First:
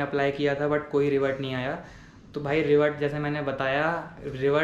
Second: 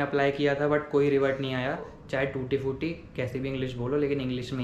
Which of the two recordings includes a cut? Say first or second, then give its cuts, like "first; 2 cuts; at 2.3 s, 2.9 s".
second; 1 cut; at 2.0 s